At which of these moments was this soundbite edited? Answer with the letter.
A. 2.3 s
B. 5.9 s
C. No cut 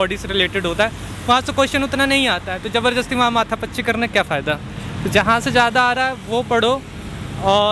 C